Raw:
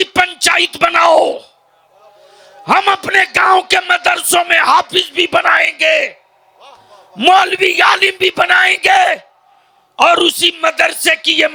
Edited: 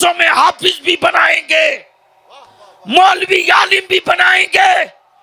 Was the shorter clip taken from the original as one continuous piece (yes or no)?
yes